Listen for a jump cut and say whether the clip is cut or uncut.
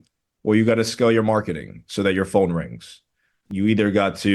cut